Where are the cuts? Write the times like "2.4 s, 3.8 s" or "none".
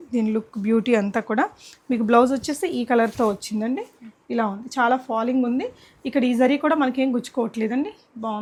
none